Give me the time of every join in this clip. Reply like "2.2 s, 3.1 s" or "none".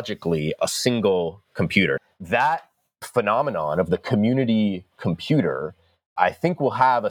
2.0 s, 6.1 s

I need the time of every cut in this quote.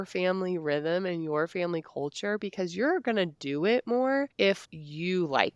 4.6 s

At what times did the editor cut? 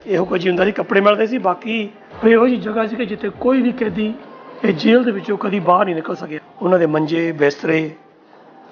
2.0 s, 6.3 s

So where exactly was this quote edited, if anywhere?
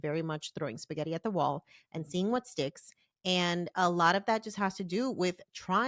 none

